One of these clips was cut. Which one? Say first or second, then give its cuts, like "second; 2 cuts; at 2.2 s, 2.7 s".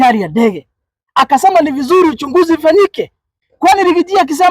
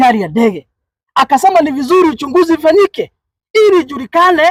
first; 1 cut; at 3.3 s